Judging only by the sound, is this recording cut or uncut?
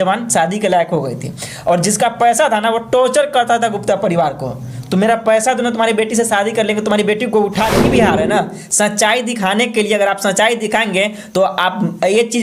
cut